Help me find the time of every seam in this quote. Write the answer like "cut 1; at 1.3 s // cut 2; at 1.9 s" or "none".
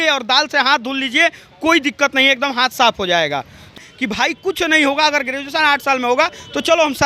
cut 1; at 3.7 s